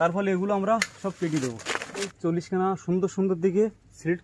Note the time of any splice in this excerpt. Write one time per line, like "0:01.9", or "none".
0:02.1